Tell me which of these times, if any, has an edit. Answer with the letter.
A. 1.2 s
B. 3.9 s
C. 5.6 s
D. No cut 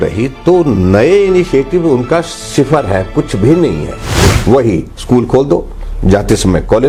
D